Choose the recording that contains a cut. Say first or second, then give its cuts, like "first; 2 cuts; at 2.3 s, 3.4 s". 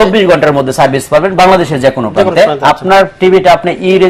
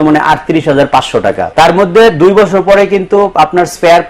second; 1 cut; at 1.4 s